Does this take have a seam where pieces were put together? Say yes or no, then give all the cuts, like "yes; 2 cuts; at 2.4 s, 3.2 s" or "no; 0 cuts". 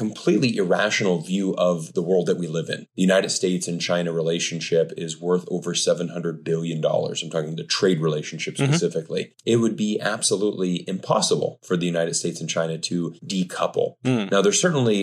yes; 2 cuts; at 2.9 s, 9.3 s